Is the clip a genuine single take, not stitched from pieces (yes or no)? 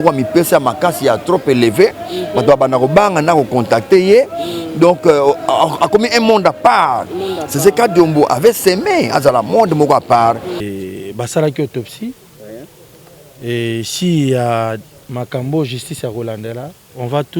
no